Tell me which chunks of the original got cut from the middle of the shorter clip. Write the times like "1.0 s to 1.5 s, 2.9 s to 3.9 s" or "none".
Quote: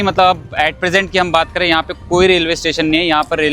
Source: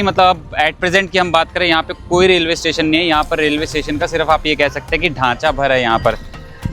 none